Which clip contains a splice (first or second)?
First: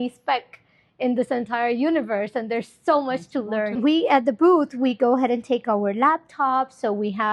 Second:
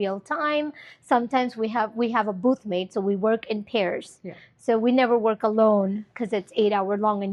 first